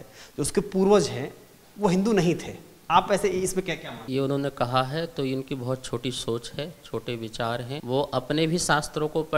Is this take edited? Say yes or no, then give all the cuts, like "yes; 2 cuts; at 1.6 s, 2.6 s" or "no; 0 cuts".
yes; 2 cuts; at 4.0 s, 7.7 s